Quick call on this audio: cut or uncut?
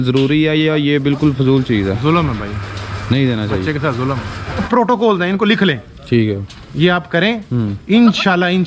cut